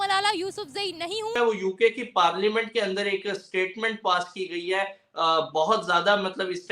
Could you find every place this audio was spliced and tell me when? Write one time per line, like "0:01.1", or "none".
0:01.4